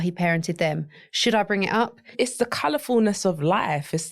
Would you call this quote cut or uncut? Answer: cut